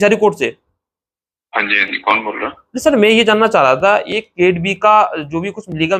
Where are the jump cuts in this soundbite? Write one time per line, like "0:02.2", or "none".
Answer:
none